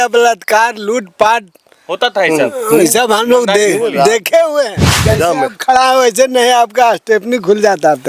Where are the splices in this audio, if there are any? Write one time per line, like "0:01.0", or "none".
0:04.9